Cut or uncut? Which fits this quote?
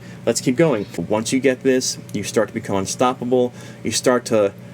cut